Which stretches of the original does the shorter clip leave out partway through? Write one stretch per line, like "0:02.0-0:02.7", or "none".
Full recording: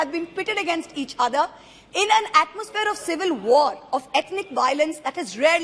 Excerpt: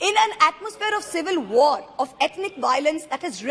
none